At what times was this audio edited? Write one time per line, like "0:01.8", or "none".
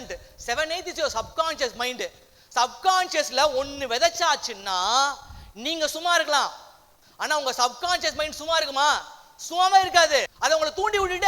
0:10.3

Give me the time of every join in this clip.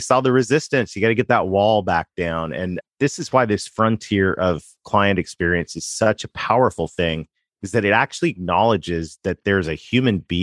none

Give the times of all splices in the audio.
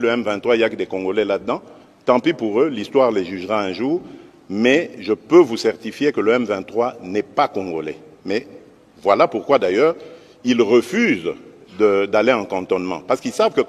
none

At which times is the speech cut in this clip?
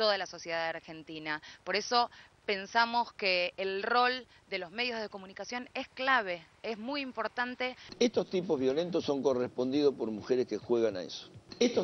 0:07.9

